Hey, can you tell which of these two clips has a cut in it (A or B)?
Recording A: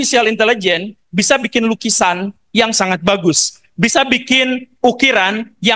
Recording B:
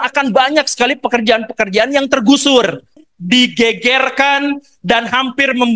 B